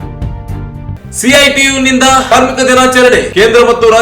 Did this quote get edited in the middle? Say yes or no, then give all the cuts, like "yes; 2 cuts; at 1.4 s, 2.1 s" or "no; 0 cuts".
yes; 1 cut; at 0.9 s